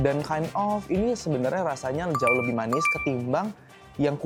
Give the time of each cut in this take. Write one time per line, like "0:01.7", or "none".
none